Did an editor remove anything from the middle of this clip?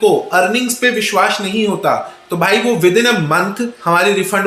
no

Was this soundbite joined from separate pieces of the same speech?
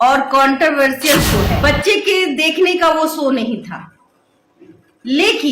yes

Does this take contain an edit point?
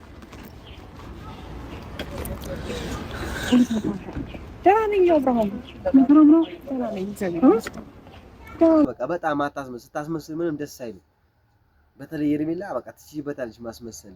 yes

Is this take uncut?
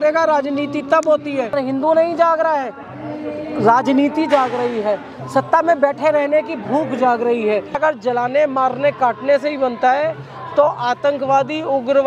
no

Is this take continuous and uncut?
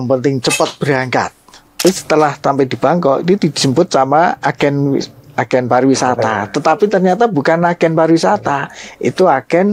no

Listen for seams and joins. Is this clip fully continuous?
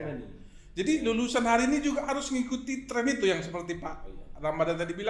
yes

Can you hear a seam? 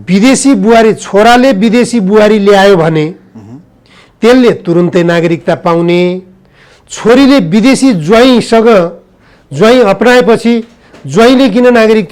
no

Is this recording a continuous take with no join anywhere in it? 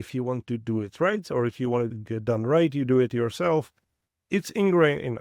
no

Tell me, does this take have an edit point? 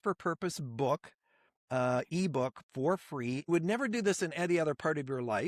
yes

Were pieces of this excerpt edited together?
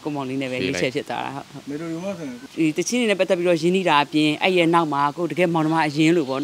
yes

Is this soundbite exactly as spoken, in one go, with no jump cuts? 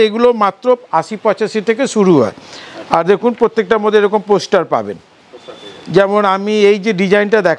yes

